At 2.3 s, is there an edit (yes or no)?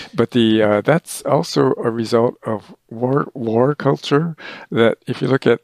no